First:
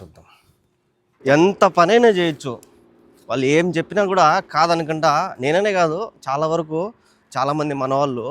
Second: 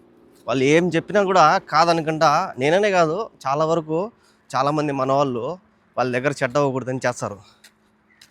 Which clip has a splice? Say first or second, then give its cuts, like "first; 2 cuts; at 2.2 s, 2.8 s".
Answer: first; 1 cut; at 1.2 s